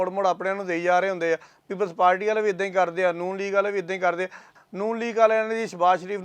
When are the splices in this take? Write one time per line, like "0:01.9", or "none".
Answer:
0:04.5